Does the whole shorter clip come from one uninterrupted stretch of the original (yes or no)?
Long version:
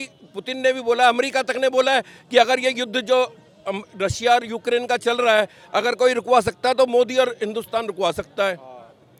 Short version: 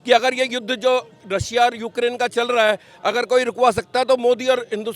no